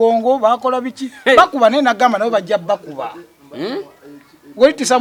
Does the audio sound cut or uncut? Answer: uncut